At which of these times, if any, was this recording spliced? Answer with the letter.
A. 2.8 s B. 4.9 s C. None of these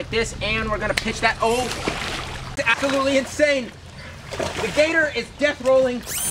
A